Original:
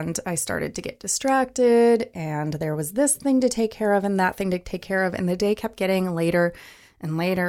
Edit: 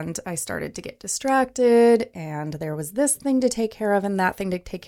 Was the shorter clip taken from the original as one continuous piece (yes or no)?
yes